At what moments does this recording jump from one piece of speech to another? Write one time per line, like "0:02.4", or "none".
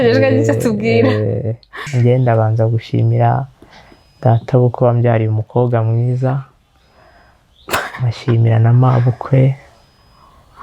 0:01.8